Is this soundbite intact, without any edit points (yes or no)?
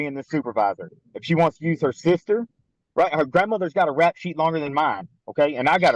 yes